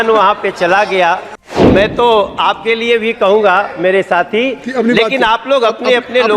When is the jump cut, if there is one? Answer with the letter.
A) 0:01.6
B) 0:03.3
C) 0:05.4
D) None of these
A